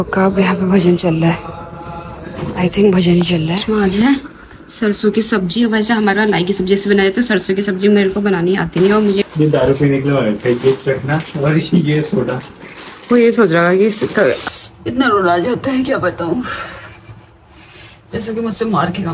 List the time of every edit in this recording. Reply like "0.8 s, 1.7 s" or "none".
3.6 s, 9.2 s, 14.4 s